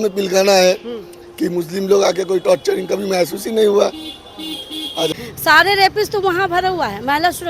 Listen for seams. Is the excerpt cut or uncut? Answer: cut